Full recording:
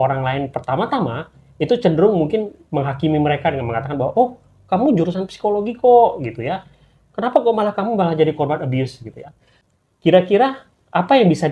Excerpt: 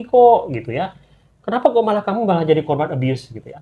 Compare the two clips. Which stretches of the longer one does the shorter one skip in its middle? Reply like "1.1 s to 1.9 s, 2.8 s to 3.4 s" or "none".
none